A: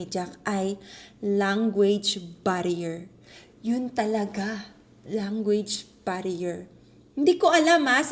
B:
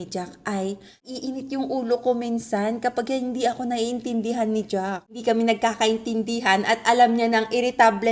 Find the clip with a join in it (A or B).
B